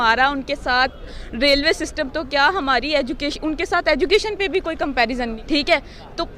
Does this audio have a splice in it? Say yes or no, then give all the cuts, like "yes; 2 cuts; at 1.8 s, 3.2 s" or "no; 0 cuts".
yes; 1 cut; at 5.4 s